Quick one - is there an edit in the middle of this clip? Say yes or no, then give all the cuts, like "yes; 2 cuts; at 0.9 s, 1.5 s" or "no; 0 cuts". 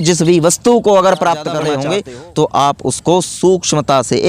yes; 1 cut; at 1.7 s